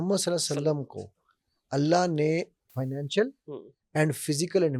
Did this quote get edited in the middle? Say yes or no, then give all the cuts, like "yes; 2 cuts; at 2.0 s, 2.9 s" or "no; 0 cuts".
no; 0 cuts